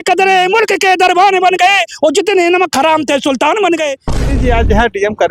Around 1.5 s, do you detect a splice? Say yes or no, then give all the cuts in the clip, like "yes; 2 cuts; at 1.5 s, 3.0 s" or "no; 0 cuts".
no; 1 cut; at 4.2 s